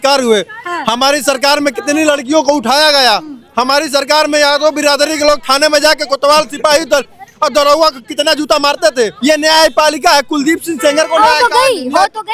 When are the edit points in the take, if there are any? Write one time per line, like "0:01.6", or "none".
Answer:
0:09.1